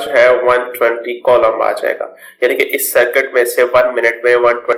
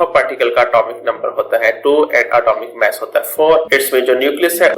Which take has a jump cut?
second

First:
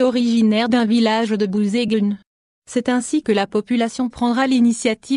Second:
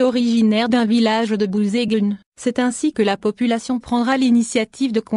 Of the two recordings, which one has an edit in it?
second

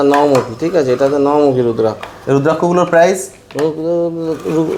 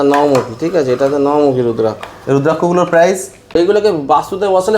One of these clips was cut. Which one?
second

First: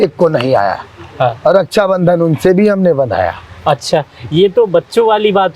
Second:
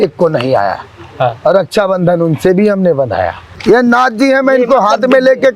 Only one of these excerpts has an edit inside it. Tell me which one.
second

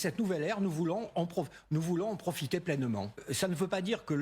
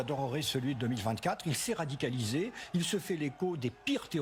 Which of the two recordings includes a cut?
first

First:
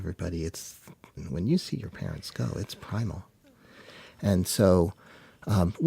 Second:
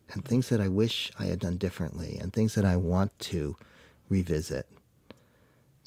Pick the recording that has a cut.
first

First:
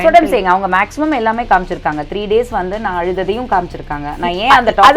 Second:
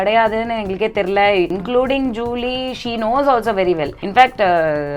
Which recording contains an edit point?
second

